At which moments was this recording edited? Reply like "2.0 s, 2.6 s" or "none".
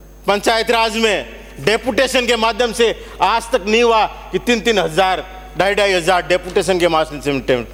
none